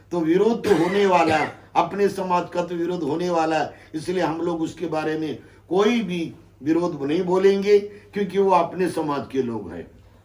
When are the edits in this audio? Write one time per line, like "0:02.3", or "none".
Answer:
none